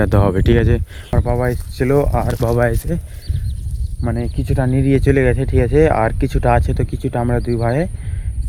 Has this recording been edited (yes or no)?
no